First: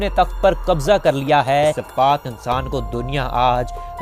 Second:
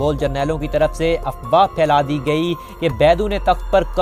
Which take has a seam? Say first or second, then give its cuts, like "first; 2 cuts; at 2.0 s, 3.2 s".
first; 1 cut; at 1.8 s